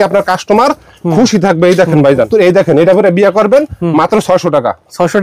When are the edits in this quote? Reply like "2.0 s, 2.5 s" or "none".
2.3 s